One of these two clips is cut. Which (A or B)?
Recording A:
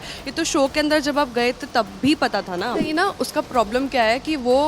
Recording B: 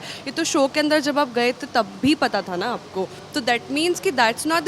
A